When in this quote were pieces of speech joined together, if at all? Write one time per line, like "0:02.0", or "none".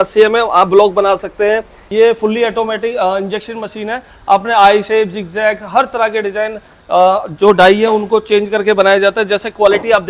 0:01.8